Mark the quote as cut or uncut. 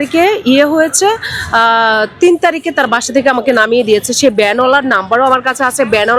uncut